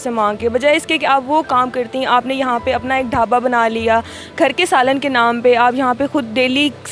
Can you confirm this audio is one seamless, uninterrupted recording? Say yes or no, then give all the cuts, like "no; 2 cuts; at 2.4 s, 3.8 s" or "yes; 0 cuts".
yes; 0 cuts